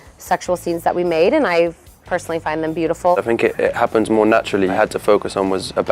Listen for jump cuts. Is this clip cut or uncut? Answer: cut